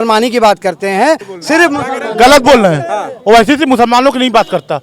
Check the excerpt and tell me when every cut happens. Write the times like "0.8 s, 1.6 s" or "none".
1.3 s